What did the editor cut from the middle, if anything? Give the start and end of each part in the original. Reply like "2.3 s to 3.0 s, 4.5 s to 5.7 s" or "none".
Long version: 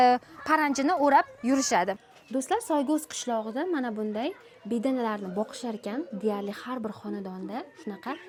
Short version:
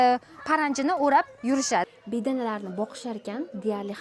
1.9 s to 4.5 s